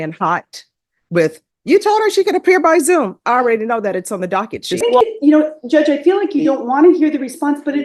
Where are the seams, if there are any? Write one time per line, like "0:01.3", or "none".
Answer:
0:04.8